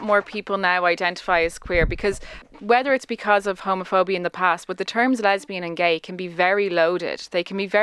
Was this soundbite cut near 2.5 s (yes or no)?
yes